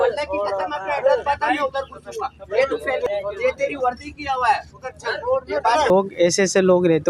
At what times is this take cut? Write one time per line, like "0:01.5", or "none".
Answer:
0:03.1
0:05.9